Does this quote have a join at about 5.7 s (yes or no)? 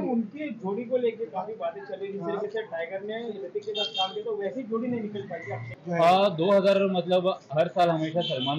yes